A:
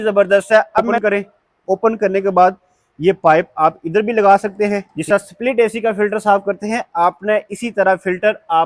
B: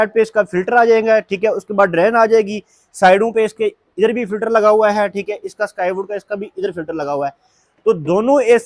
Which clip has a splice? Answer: A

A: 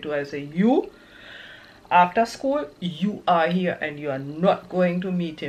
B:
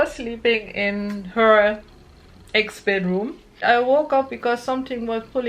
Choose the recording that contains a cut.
B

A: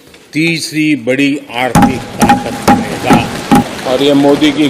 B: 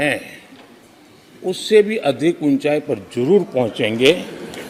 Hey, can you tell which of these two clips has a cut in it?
A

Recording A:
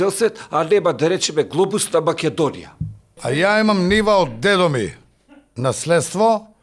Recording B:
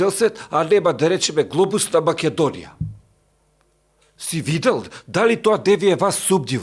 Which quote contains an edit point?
A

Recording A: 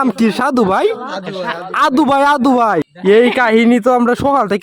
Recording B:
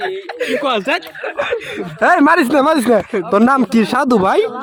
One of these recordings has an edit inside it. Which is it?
A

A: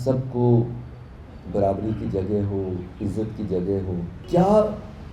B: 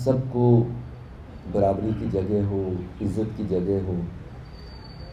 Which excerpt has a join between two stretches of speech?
A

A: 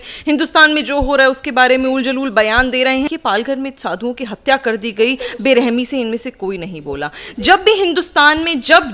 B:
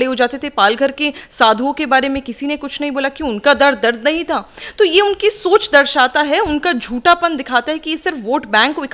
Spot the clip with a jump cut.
A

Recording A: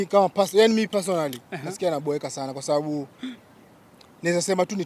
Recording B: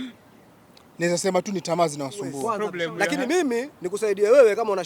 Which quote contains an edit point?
B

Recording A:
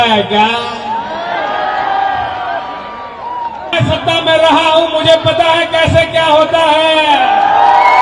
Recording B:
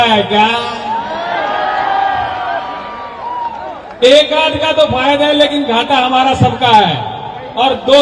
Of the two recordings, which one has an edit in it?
A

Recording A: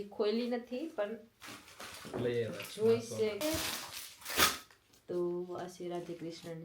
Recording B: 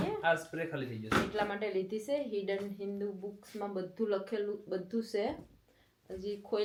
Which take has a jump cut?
A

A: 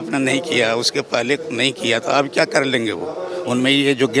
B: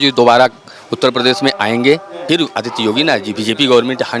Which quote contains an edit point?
B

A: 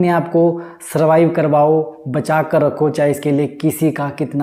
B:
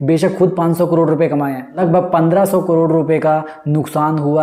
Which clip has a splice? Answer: B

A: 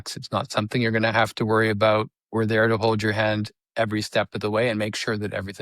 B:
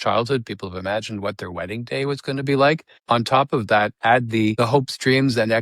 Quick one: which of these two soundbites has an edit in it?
B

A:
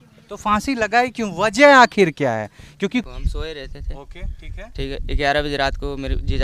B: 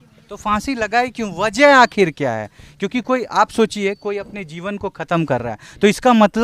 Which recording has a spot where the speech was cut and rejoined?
A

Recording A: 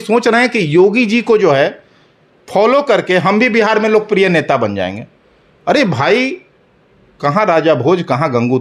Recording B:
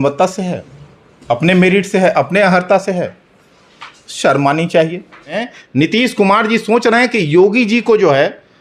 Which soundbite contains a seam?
B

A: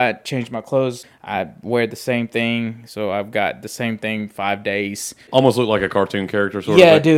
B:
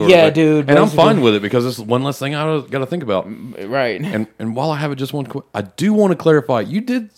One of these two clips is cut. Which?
A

